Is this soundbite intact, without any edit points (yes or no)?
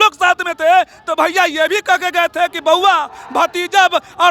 yes